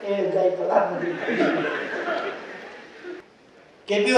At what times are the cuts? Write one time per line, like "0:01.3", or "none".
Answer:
0:03.2

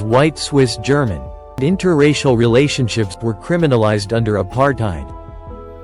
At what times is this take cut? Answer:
0:01.4

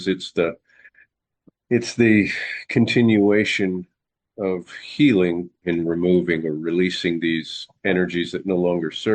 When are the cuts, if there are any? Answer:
0:05.5

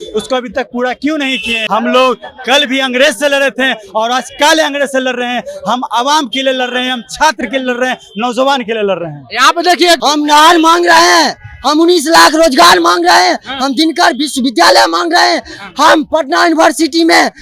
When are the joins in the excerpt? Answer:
0:01.5
0:10.0

